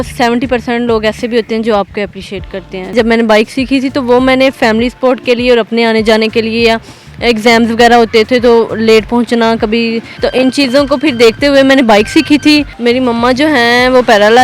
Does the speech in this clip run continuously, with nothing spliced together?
no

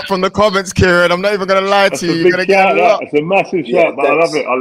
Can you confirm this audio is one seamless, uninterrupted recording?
yes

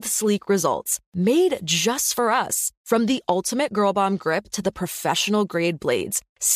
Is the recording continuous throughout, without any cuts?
yes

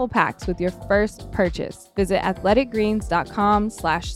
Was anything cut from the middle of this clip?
yes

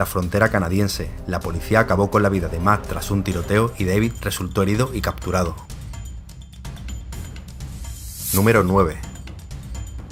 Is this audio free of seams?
yes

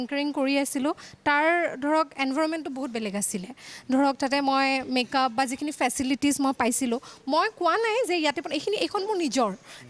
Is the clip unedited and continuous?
yes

